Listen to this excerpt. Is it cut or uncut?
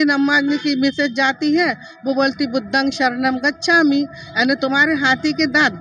uncut